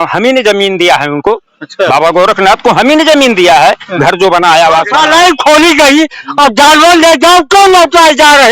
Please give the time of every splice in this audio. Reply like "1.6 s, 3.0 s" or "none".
4.9 s